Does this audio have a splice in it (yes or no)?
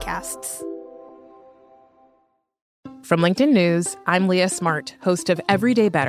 yes